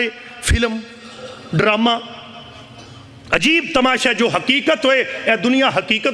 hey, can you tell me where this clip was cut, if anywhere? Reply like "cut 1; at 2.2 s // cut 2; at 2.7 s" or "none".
none